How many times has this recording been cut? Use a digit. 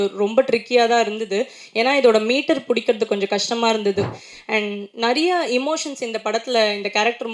1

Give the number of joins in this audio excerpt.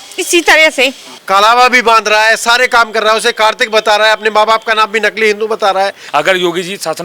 2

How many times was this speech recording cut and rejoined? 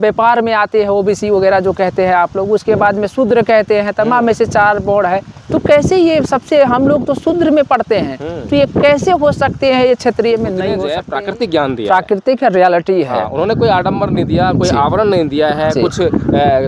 1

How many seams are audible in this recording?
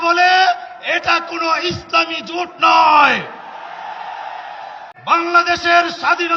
1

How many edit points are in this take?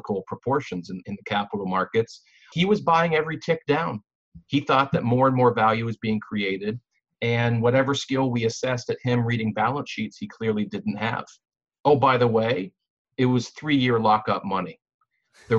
2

